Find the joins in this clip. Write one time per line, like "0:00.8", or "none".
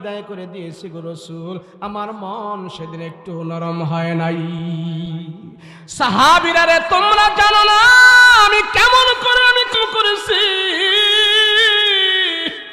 0:09.8